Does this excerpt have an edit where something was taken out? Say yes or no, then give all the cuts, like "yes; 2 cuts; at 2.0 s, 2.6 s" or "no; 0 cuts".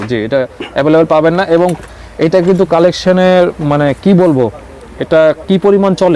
no; 0 cuts